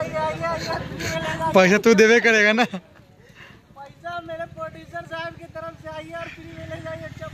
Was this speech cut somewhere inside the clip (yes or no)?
no